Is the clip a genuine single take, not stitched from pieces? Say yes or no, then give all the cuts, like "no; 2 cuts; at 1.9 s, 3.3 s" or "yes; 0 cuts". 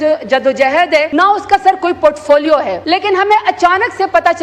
no; 2 cuts; at 1.1 s, 2.8 s